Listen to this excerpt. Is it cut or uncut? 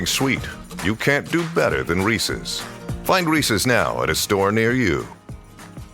uncut